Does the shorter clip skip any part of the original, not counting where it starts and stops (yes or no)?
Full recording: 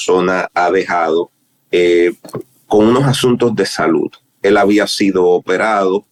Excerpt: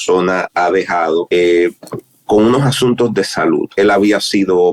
yes